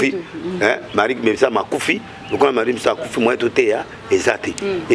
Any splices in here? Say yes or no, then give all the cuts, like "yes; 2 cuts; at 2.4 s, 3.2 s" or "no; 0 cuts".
no; 0 cuts